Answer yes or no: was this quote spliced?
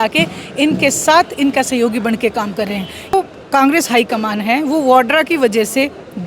yes